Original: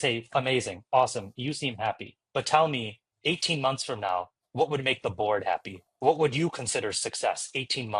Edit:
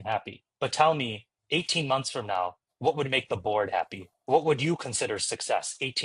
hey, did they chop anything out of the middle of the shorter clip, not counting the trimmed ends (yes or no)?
no